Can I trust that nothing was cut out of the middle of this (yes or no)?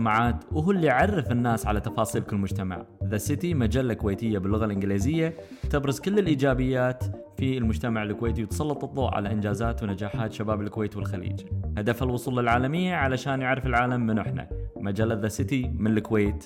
yes